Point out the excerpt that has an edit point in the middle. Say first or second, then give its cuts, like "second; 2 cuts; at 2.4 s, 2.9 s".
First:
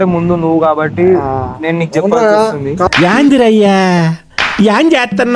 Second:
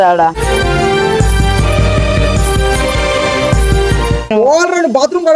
second; 1 cut; at 4.3 s